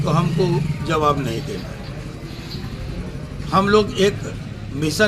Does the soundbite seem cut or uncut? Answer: uncut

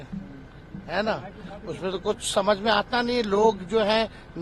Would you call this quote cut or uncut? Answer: uncut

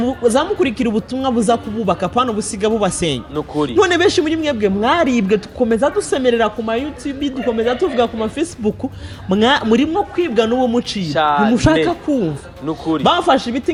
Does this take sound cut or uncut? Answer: uncut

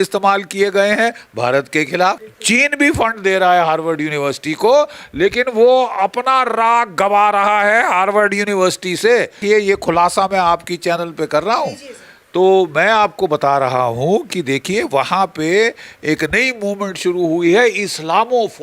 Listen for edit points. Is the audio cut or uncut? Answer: cut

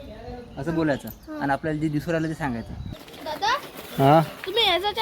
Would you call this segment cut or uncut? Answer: cut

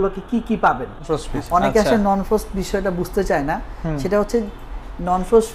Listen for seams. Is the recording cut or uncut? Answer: cut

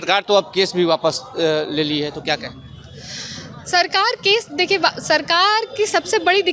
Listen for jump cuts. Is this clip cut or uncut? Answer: uncut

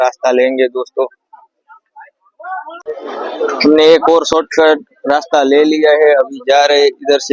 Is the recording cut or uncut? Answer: cut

